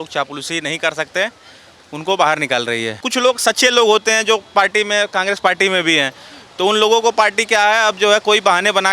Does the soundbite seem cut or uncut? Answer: cut